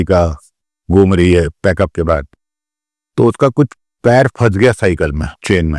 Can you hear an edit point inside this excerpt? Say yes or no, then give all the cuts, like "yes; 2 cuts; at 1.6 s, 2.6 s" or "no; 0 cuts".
no; 0 cuts